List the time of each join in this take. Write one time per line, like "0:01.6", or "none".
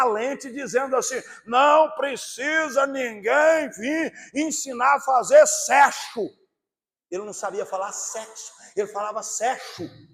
none